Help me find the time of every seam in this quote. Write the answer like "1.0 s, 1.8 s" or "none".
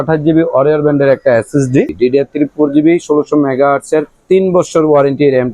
1.9 s